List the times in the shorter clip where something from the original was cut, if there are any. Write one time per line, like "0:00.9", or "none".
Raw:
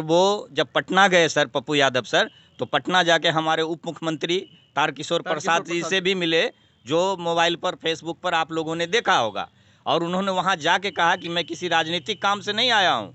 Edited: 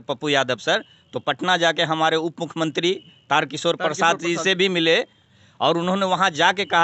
0:05.2